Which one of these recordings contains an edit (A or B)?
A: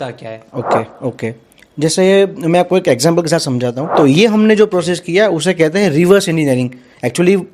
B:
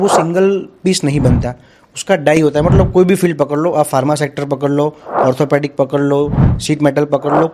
A